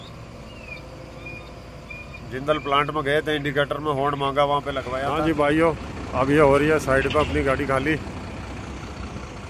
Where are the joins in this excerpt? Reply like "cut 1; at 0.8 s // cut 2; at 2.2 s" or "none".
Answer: cut 1; at 5.1 s